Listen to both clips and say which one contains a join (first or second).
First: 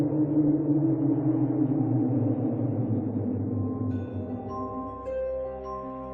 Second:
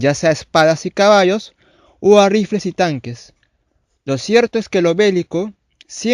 second